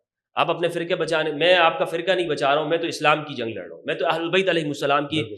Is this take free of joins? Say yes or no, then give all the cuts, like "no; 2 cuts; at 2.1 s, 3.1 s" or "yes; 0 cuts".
yes; 0 cuts